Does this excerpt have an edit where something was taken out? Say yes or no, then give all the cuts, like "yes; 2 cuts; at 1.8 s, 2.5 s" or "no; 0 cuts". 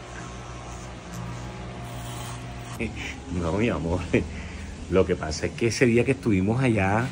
yes; 1 cut; at 2.7 s